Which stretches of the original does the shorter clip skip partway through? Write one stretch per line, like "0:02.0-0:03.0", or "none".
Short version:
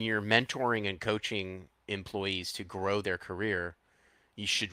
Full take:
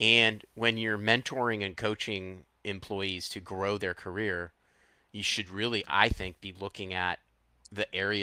none